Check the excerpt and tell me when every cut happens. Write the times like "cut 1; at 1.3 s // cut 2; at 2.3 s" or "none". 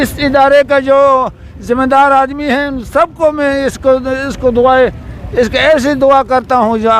none